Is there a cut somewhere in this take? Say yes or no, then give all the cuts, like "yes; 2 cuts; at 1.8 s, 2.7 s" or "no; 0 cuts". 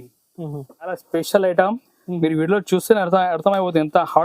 yes; 1 cut; at 0.9 s